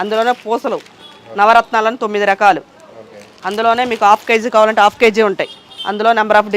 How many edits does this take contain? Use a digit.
0